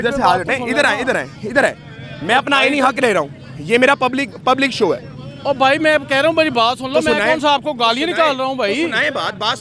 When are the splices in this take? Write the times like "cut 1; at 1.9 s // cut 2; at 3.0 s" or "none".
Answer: none